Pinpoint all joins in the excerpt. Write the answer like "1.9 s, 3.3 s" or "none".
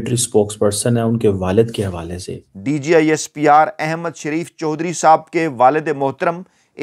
2.5 s